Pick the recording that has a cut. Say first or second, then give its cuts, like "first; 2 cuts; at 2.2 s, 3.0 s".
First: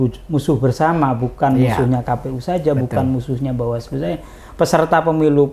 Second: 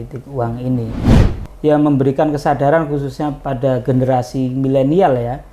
second; 1 cut; at 1.2 s